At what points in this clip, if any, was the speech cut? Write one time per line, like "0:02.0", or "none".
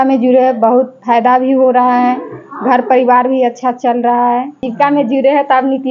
0:04.6